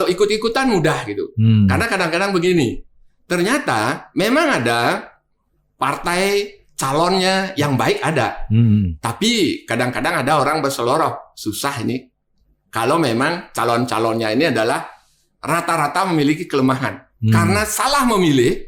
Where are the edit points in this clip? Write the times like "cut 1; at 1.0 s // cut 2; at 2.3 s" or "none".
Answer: none